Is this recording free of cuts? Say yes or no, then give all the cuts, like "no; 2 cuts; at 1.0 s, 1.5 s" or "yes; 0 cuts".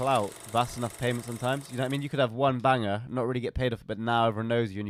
yes; 0 cuts